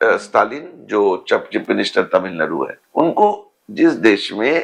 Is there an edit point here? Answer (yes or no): yes